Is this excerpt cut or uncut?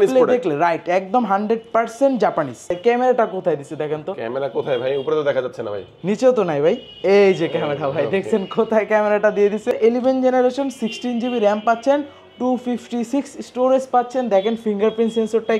cut